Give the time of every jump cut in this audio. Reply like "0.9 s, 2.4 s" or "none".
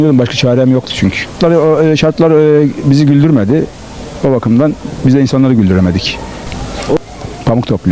1.4 s, 7.0 s